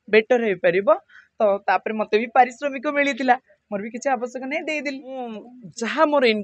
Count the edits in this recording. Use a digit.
1